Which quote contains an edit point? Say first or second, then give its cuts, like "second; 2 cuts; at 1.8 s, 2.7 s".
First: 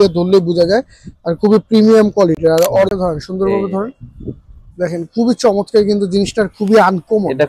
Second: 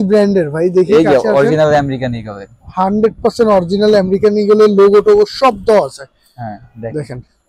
first; 1 cut; at 2.9 s